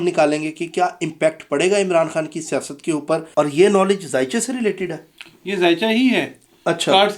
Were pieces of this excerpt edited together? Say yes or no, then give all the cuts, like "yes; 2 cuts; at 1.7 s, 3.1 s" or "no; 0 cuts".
yes; 1 cut; at 3.3 s